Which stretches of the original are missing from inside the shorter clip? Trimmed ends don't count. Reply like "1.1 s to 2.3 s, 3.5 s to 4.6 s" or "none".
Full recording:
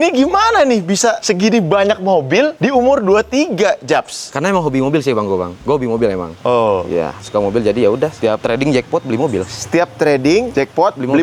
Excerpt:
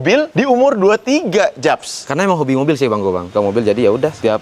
5.5 s to 7.2 s